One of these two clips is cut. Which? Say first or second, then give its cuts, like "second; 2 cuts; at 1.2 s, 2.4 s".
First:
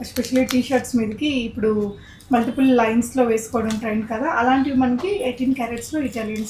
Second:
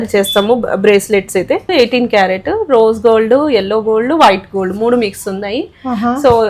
second; 1 cut; at 1.6 s